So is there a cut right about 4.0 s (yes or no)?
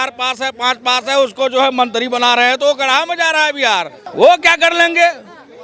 yes